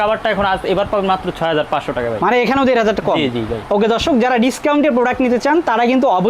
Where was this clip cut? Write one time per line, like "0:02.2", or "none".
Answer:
none